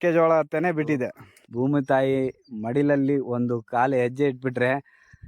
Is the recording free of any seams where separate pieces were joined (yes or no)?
no